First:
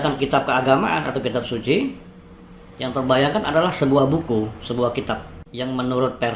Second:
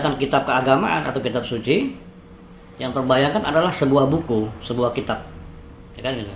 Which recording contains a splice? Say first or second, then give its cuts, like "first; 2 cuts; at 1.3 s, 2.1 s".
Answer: first; 1 cut; at 5.4 s